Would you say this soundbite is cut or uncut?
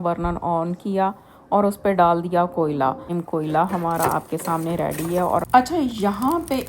cut